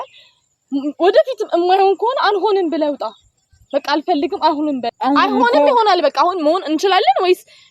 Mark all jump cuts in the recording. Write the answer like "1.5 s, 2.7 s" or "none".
4.9 s